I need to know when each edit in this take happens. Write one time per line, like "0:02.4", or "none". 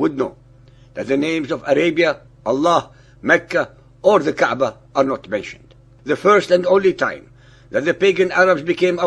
0:05.0